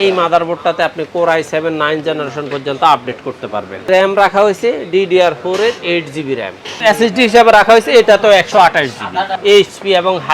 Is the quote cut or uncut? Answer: cut